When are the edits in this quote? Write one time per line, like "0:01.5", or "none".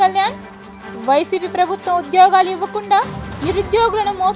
none